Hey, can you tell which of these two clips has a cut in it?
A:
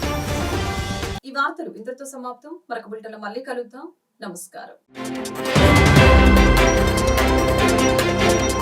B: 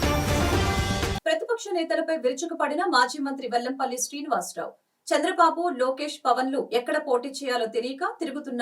B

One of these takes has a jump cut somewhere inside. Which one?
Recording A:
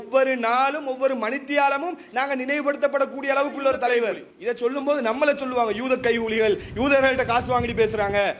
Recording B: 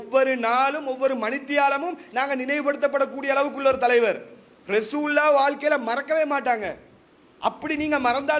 A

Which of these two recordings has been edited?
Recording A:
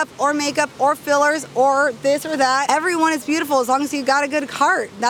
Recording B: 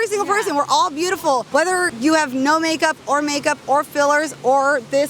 B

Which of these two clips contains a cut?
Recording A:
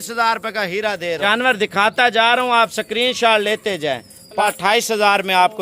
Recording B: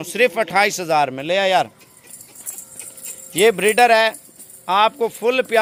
A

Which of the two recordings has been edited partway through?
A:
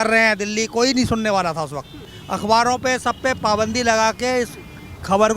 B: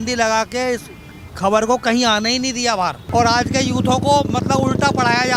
A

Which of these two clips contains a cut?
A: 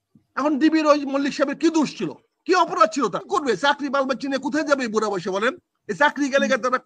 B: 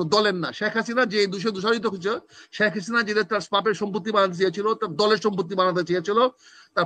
A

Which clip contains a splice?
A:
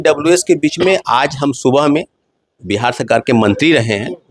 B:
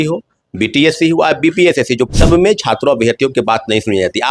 B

